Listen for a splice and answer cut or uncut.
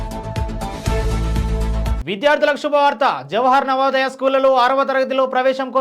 uncut